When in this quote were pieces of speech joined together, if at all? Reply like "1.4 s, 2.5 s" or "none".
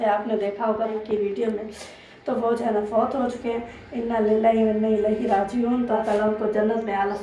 0.9 s, 5.9 s

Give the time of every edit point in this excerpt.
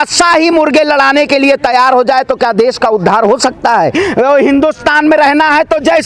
3.9 s

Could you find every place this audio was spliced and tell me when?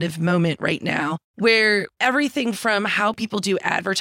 1.2 s, 1.9 s

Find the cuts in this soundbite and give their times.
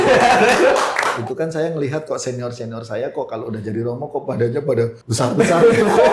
1.2 s, 5.0 s

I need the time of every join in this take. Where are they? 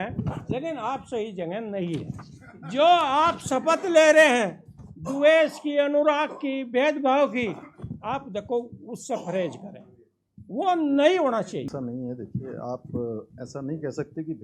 11.7 s

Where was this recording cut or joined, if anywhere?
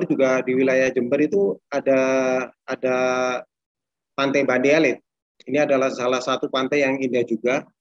none

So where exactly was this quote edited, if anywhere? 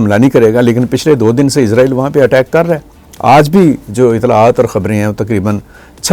none

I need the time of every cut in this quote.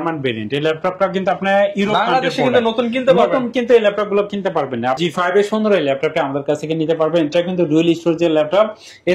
5.0 s

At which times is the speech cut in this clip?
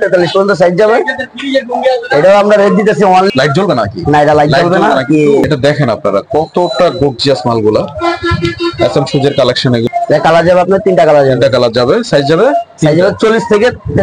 3.3 s, 5.4 s, 9.8 s

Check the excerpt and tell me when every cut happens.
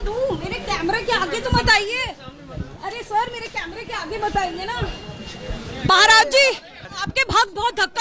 5.9 s

